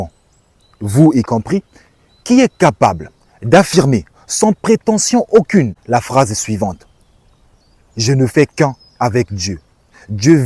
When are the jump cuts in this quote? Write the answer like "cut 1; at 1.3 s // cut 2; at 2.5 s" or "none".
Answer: cut 1; at 5.8 s